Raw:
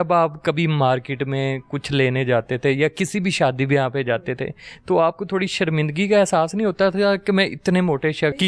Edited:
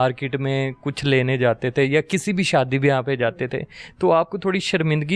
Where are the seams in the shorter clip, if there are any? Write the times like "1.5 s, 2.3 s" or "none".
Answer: none